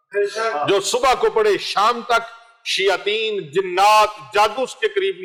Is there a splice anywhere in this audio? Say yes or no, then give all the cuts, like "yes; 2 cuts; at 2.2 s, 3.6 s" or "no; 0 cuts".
no; 0 cuts